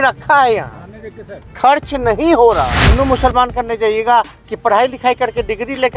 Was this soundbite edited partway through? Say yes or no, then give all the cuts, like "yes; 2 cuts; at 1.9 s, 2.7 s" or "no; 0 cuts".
yes; 1 cut; at 2.8 s